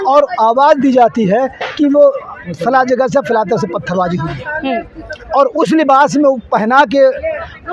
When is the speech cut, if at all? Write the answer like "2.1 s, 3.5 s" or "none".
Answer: none